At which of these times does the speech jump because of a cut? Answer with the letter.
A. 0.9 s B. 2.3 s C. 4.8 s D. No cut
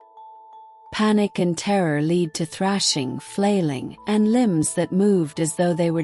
A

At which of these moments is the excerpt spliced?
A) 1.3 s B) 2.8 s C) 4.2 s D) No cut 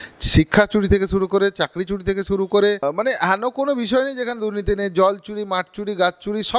B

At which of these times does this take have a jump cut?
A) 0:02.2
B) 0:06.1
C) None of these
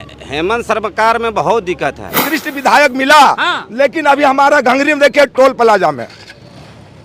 A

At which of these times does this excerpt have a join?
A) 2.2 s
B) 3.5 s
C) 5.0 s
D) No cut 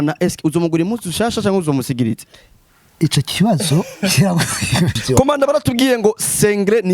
C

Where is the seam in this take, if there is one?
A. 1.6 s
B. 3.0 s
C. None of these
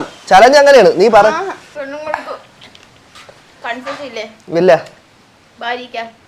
A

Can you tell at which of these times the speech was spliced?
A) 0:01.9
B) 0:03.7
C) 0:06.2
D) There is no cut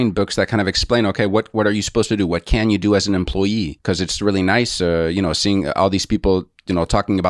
B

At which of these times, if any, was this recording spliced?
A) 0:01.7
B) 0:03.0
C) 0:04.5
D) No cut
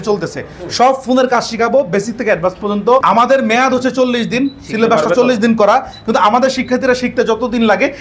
B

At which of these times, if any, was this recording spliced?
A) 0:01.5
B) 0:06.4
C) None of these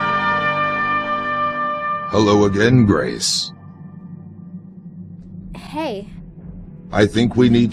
A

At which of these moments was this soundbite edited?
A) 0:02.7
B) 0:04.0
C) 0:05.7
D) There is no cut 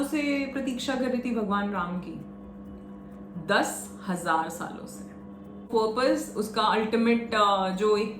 C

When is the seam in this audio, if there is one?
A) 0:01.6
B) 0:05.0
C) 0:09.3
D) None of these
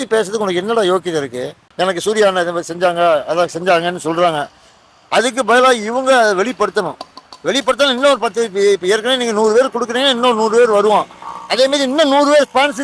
A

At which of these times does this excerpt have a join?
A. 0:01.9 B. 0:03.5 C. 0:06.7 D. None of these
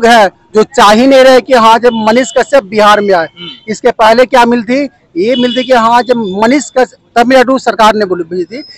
D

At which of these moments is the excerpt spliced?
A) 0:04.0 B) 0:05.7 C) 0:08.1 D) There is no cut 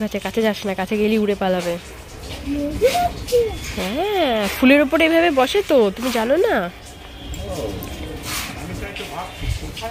D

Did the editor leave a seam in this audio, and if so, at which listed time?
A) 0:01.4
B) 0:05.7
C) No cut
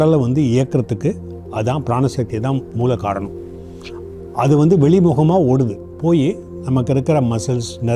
C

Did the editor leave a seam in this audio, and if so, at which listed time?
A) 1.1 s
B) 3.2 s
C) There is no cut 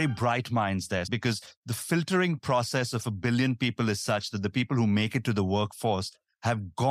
A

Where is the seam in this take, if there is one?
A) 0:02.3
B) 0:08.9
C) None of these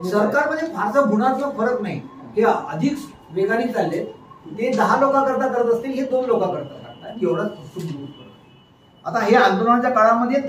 B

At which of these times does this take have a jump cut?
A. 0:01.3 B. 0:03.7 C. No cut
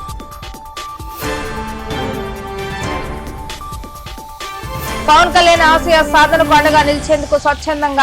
B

